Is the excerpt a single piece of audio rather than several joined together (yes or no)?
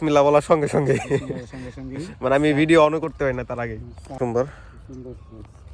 no